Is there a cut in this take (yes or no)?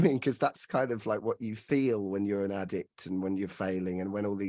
yes